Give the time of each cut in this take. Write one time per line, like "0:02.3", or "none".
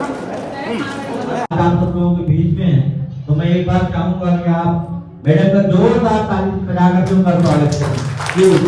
0:01.5